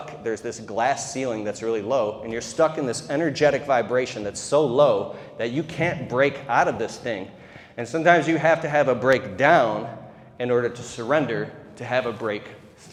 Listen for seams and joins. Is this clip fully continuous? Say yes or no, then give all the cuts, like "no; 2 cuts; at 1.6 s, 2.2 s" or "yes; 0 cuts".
yes; 0 cuts